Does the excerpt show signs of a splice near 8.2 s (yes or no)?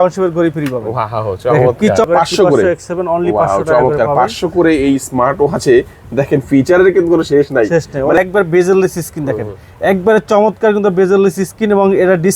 yes